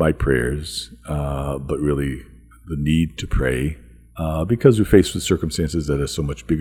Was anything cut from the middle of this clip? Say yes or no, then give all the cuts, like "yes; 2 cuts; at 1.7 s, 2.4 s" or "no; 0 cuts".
no; 0 cuts